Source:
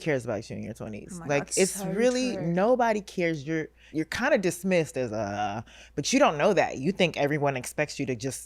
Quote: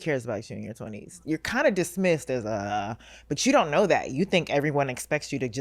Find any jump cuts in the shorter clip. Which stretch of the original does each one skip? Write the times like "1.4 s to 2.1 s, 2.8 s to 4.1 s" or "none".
1.1 s to 3.8 s